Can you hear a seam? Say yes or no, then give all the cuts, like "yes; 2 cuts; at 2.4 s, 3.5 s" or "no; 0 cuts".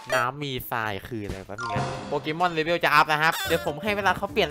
yes; 2 cuts; at 2.0 s, 3.4 s